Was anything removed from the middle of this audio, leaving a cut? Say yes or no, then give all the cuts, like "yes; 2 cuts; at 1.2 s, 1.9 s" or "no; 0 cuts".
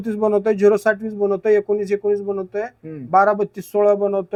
no; 0 cuts